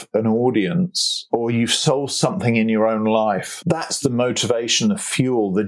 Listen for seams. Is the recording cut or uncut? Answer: cut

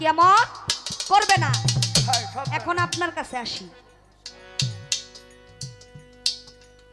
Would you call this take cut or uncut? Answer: uncut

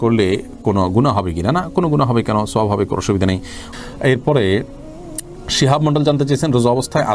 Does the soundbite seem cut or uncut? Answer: uncut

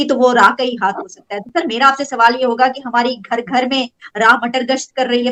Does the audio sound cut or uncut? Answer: uncut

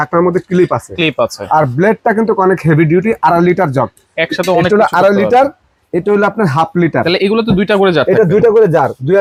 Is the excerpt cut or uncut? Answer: uncut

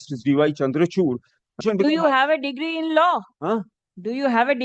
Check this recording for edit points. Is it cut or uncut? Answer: cut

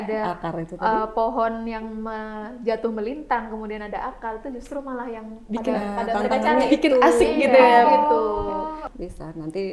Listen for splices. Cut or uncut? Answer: cut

